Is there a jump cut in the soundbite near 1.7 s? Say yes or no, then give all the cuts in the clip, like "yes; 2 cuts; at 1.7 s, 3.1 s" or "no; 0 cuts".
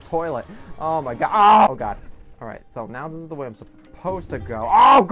yes; 1 cut; at 1.7 s